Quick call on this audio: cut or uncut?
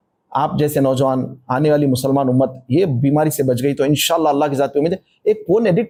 uncut